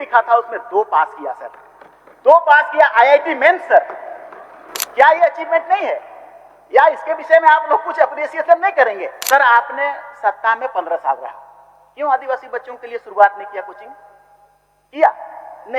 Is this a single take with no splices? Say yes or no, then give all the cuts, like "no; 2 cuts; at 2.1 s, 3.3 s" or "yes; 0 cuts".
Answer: no; 1 cut; at 9.1 s